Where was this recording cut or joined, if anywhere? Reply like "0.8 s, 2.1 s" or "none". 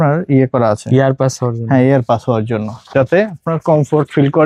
none